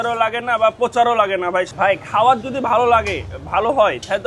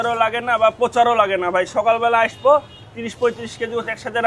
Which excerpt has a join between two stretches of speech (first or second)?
first